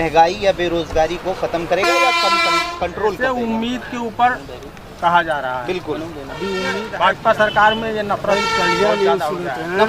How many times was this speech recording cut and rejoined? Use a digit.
1